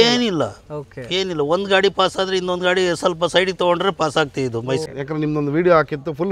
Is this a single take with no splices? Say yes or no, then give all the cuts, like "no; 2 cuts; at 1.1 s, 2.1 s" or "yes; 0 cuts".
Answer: no; 1 cut; at 4.8 s